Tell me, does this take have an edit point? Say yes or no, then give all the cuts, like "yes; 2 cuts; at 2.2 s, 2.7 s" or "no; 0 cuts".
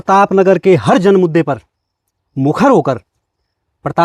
no; 0 cuts